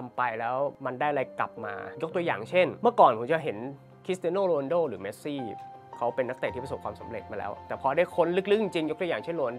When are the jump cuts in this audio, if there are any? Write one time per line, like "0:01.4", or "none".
0:00.8
0:01.9
0:02.7
0:07.6